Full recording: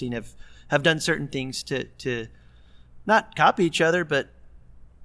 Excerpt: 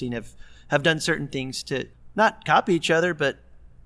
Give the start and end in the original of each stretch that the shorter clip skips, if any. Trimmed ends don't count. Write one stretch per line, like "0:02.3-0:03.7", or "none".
0:01.9-0:02.8